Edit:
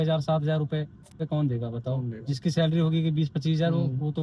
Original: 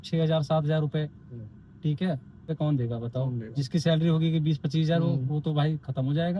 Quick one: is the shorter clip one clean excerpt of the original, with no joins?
no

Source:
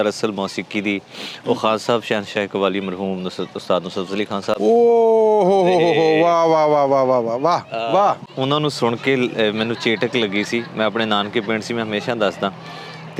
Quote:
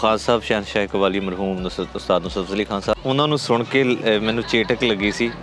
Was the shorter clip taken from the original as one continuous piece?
no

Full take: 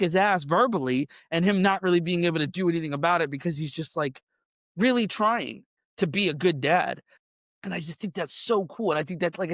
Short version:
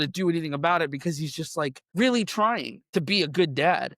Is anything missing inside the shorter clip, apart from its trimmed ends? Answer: yes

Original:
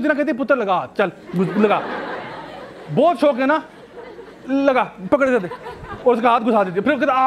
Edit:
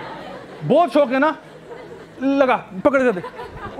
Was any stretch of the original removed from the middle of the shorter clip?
no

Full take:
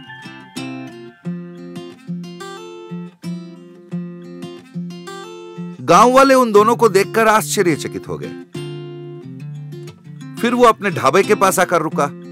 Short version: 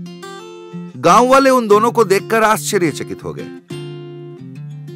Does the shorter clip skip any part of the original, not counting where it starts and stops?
yes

